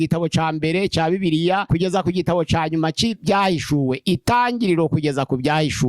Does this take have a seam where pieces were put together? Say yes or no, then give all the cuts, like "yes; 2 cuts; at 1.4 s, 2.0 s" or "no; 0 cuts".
yes; 1 cut; at 1.6 s